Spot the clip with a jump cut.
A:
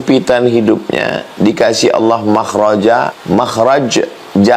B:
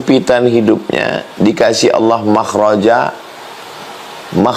A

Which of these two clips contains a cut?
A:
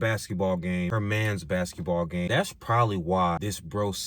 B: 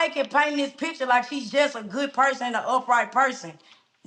A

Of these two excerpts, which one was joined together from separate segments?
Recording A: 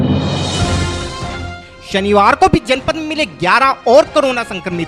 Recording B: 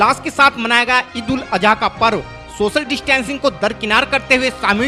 A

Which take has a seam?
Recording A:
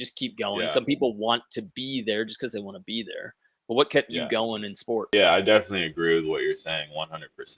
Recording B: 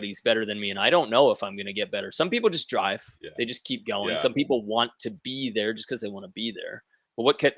A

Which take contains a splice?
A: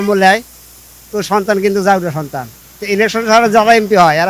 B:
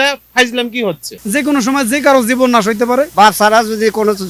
B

